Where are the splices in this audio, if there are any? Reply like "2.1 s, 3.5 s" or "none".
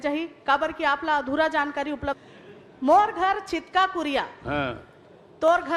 2.2 s